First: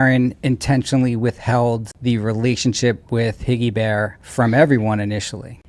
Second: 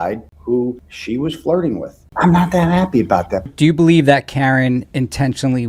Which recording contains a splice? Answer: second; 3 cuts; at 0.9 s, 2.0 s, 3.4 s

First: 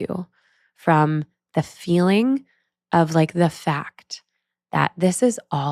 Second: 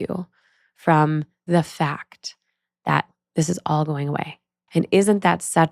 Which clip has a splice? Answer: second; 3 cuts; at 1.4 s, 3.1 s, 4.6 s

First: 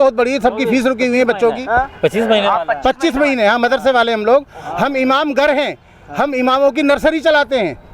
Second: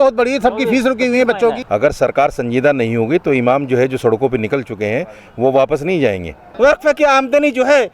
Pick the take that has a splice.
second; 2 cuts; at 1.6 s, 6.4 s

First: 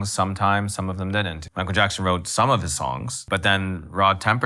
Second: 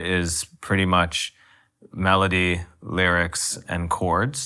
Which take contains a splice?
first; 2 cuts; at 1.4 s, 3.2 s

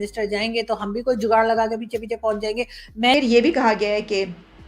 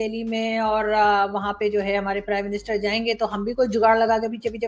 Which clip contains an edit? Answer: first; 1 cut; at 3.1 s

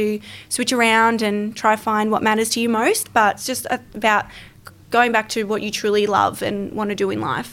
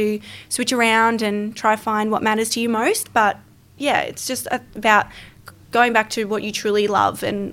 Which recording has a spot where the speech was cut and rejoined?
first; 1 cut; at 3.4 s

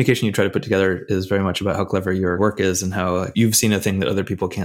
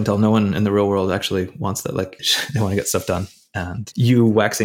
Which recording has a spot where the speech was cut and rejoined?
second; 1 cut; at 2.3 s

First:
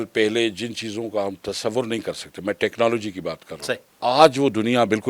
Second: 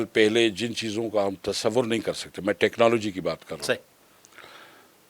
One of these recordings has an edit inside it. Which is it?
first; 1 cut; at 3.9 s

